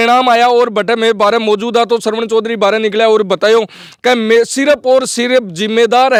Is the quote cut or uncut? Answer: uncut